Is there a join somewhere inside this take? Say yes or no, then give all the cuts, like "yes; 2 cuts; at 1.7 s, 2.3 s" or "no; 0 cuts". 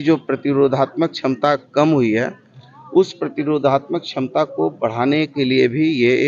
no; 0 cuts